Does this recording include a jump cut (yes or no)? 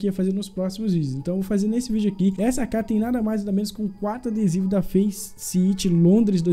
no